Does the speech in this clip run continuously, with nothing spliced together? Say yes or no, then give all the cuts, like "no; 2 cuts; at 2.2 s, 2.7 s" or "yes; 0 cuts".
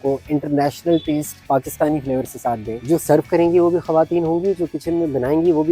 no; 2 cuts; at 1.3 s, 2.8 s